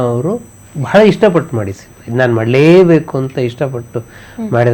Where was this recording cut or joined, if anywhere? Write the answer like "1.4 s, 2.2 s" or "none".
none